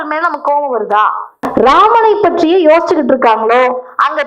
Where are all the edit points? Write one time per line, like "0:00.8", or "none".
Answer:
0:01.4